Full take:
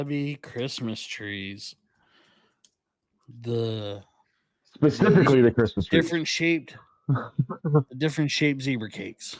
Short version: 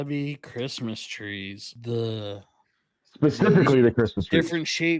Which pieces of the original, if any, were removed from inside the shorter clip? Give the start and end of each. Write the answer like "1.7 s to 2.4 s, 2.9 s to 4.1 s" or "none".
1.7 s to 3.3 s